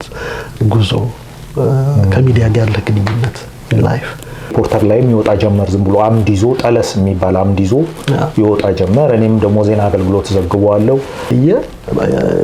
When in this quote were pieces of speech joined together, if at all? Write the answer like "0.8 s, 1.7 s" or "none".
4.5 s, 11.3 s